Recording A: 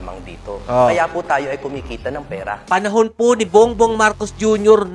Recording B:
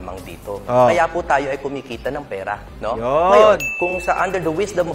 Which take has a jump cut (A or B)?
A